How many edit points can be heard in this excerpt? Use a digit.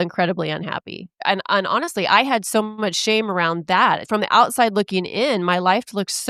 2